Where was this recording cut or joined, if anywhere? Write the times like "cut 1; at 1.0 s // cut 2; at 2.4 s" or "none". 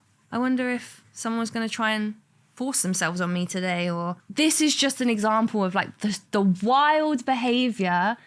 cut 1; at 4.2 s